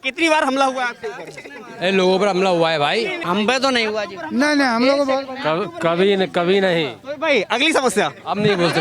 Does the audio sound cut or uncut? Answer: cut